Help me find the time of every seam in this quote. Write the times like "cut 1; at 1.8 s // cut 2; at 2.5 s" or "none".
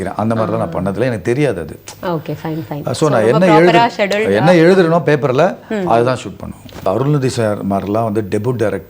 cut 1; at 6.9 s